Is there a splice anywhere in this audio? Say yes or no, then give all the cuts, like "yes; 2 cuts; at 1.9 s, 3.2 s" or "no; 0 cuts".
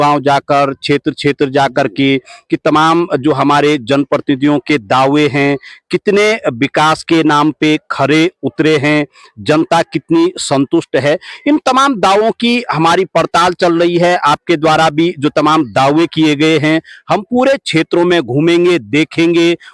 no; 0 cuts